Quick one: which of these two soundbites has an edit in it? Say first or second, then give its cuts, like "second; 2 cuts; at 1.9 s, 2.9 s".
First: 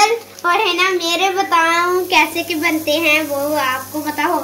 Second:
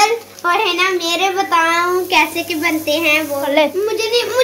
second; 1 cut; at 3.5 s